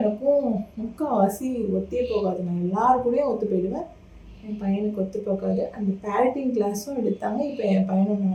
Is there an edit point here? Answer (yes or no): no